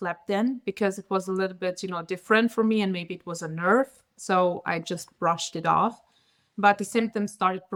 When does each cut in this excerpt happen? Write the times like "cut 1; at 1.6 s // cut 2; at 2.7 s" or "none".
none